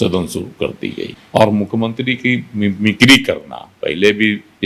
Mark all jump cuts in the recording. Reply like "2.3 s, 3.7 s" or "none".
1.1 s